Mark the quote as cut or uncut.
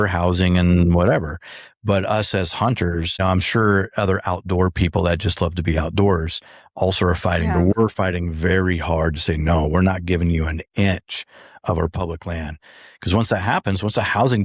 cut